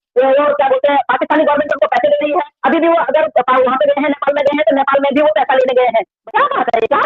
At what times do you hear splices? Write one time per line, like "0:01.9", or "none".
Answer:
0:06.1